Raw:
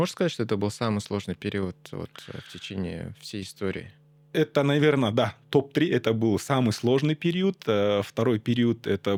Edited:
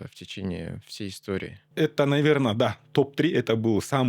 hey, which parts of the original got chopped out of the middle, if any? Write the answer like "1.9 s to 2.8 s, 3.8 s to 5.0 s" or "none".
3.9 s to 4.2 s